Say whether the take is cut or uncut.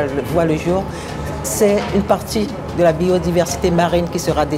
uncut